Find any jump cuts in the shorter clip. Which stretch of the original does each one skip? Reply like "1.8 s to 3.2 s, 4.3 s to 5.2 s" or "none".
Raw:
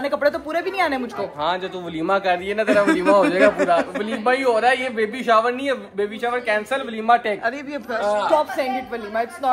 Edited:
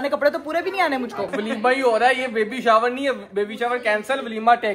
1.3 s to 3.9 s

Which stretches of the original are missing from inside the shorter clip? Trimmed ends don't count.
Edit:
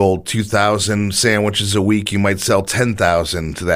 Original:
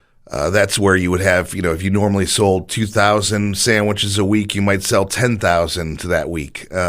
none

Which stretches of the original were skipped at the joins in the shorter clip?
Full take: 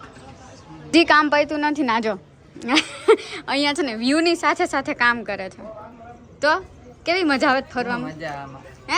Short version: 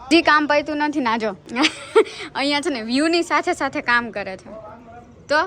2.3 s to 2.6 s

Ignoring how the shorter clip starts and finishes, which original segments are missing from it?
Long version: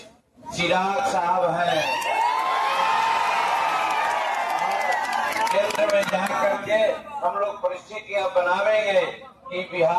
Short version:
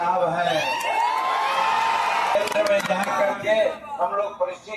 3.6 s to 5.6 s

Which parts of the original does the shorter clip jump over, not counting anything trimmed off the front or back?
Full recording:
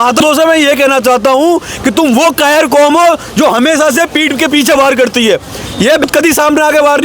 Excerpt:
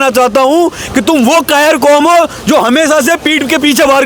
none

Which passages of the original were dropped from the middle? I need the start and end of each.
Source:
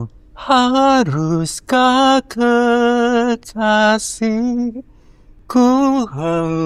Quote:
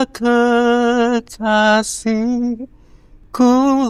none

